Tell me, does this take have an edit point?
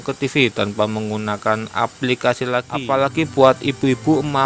yes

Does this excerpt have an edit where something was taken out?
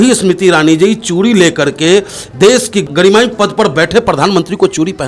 yes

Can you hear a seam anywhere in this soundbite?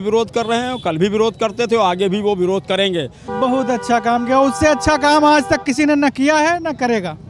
yes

